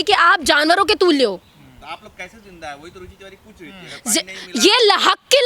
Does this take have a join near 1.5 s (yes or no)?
no